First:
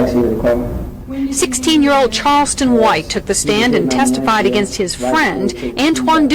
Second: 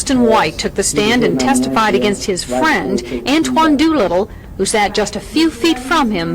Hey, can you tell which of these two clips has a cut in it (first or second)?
second